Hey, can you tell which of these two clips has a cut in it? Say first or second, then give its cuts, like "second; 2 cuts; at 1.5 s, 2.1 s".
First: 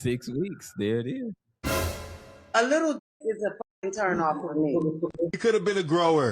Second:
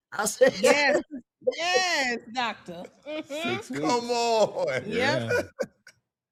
first; 1 cut; at 1.9 s